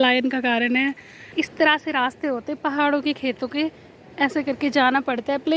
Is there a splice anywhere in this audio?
yes; 1 cut; at 1.2 s

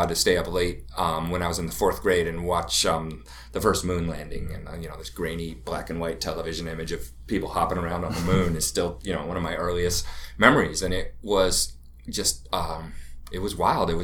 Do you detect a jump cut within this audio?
no; 0 cuts

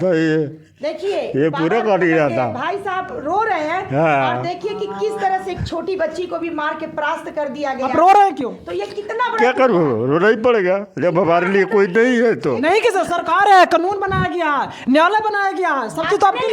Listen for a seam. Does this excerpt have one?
no; 0 cuts

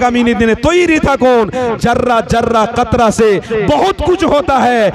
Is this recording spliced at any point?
no; 0 cuts

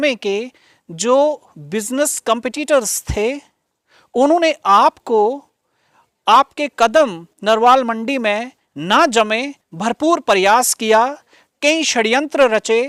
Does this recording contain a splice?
no; 0 cuts

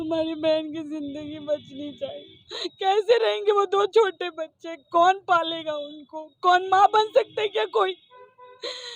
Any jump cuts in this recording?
no; 0 cuts

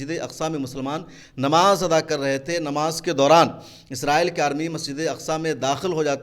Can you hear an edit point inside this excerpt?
no; 0 cuts

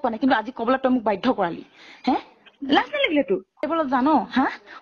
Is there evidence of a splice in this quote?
yes; 1 cut; at 3.6 s

